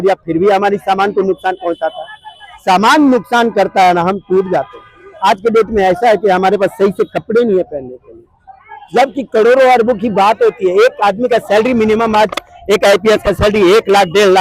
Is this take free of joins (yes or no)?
yes